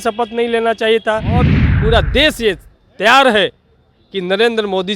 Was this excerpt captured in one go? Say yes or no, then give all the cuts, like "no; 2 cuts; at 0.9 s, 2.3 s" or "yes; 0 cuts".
no; 1 cut; at 1.5 s